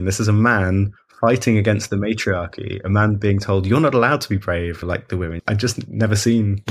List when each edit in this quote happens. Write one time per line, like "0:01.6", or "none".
0:04.9